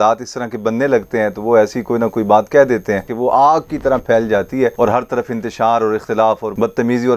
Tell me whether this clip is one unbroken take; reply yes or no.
no